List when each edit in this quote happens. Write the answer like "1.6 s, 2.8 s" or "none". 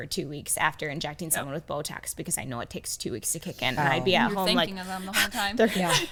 none